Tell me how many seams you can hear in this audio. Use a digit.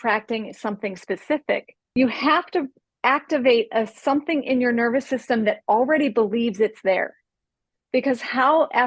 2